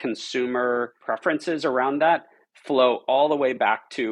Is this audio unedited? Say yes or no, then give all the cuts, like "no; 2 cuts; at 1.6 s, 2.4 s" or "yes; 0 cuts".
no; 1 cut; at 1.0 s